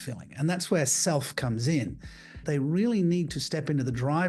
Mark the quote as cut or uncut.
cut